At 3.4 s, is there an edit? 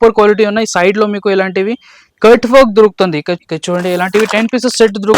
yes; 1 cut; at 3.4 s

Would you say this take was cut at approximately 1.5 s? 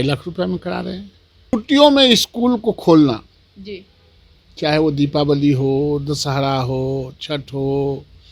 yes; 1 cut; at 1.5 s

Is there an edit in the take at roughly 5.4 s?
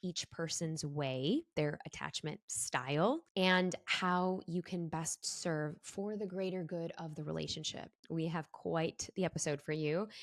no; 2 cuts; at 3.3 s, 8.0 s

